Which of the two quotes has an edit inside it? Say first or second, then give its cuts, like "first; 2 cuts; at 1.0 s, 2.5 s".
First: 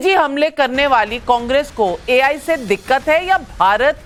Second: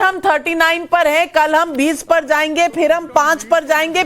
second; 1 cut; at 2.5 s